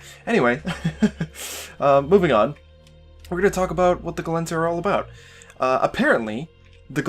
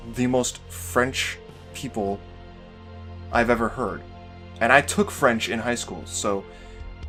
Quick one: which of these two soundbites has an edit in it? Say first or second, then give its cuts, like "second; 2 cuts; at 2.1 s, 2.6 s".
first; 1 cut; at 4.5 s